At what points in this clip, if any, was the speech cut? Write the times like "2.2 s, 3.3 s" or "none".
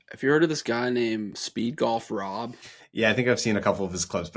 1.4 s